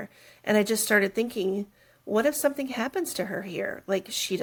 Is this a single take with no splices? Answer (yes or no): yes